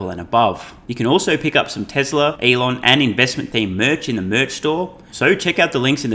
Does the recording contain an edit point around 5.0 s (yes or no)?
yes